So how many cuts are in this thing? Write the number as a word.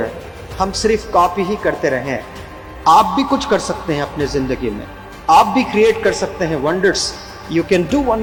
zero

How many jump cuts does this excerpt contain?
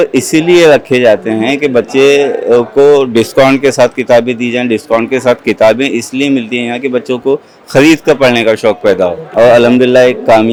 zero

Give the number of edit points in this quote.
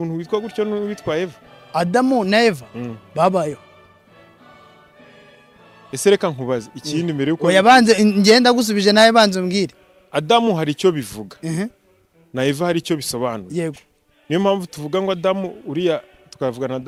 zero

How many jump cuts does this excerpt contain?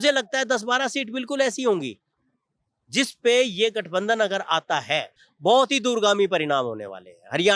one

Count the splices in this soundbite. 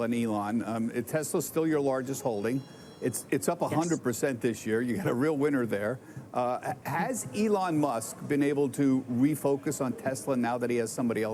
zero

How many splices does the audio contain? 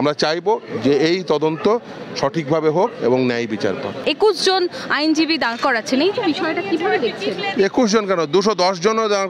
one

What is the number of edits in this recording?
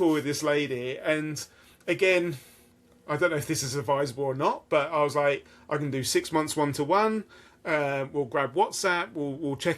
zero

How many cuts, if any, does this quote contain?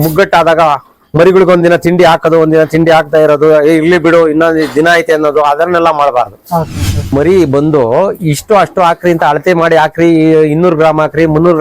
one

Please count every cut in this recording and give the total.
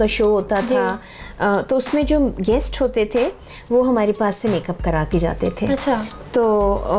zero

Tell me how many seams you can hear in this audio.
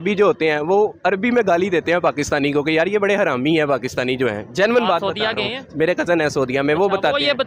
zero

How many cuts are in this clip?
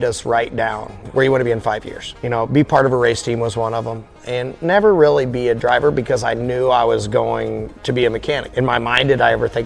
three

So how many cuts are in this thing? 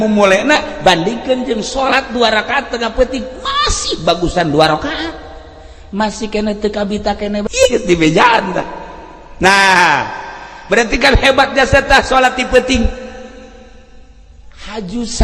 one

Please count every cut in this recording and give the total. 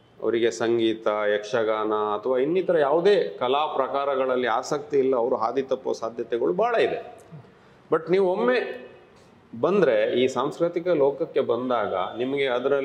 zero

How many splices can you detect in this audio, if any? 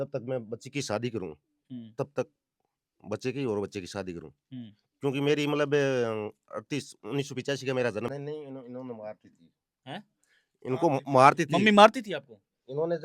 one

